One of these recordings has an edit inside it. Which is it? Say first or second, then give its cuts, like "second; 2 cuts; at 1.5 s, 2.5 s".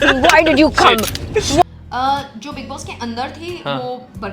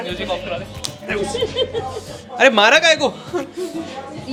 first; 1 cut; at 1.6 s